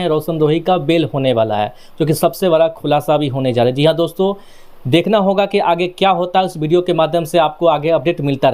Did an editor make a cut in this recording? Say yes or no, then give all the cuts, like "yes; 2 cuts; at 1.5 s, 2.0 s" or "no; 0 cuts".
no; 0 cuts